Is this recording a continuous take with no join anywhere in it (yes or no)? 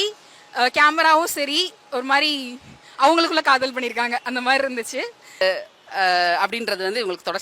no